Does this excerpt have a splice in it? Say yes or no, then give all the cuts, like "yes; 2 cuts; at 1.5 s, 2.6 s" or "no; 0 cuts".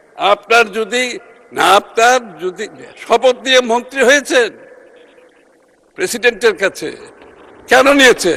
no; 0 cuts